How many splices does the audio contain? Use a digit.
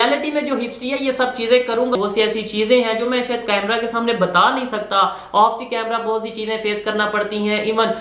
1